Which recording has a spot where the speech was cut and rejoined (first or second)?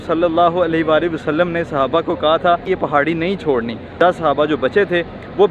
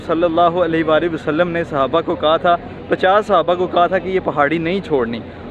first